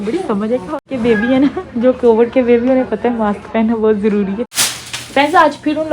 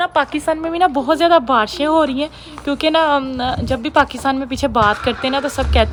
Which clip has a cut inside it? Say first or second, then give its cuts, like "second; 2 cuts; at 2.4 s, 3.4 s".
first; 2 cuts; at 0.9 s, 4.5 s